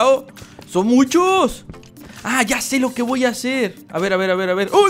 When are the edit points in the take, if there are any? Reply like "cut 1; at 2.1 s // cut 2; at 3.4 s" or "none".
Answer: none